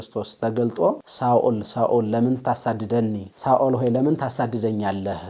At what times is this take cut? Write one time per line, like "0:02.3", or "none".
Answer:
none